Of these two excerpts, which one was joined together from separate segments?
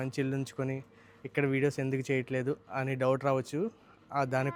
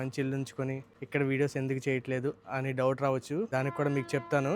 second; 2 cuts; at 0.9 s, 3.5 s

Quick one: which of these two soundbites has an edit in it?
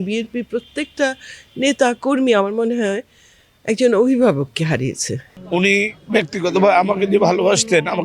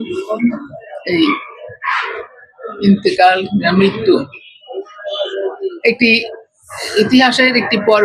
first; 1 cut; at 5.4 s

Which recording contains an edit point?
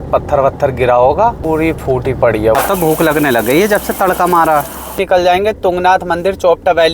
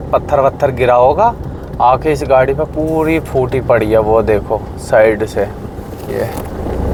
first; 3 cuts; at 1.4 s, 2.6 s, 5.0 s

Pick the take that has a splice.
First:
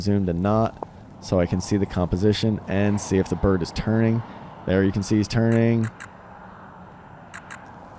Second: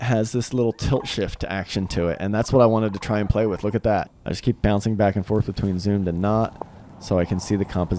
second; 1 cut; at 4.2 s

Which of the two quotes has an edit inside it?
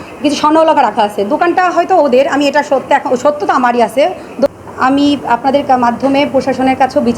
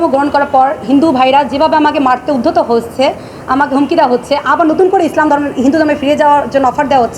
first; 1 cut; at 4.5 s

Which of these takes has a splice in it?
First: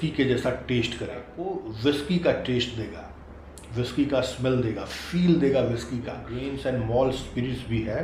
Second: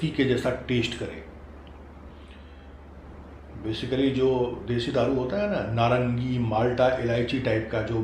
first; 2 cuts; at 1.4 s, 6.4 s

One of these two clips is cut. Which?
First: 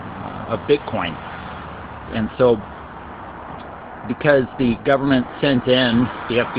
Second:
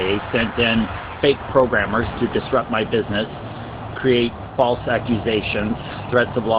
second; 1 cut; at 5.5 s

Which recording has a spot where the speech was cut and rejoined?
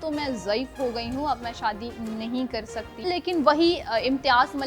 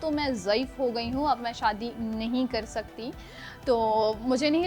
first; 1 cut; at 2.9 s

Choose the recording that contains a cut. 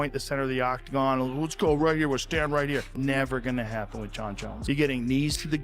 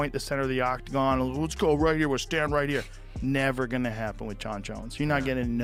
first; 2 cuts; at 2.9 s, 4.5 s

